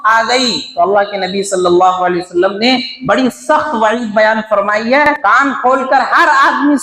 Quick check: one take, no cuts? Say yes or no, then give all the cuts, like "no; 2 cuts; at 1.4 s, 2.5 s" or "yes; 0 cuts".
no; 1 cut; at 5.1 s